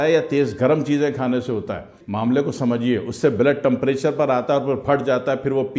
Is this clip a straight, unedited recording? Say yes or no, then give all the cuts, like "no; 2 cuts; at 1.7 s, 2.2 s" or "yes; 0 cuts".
yes; 0 cuts